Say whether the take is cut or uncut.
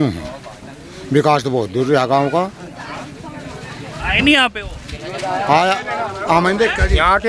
uncut